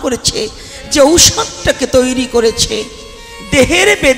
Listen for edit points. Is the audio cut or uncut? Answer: uncut